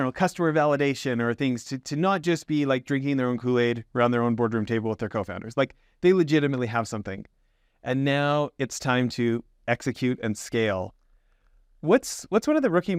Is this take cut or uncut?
uncut